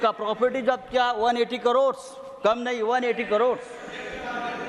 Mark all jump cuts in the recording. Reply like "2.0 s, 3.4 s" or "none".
none